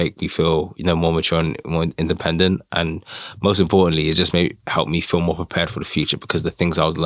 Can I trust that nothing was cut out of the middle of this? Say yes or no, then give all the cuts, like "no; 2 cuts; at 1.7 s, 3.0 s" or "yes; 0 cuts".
yes; 0 cuts